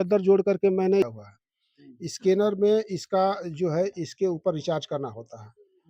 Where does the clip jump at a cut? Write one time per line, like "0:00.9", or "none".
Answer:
0:01.1